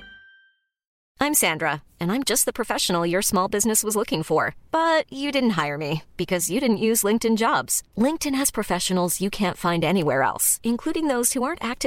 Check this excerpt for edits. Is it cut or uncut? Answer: cut